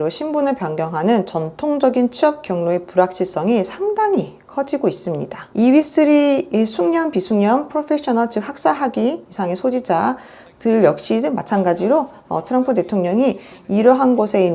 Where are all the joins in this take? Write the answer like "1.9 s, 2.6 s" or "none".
5.3 s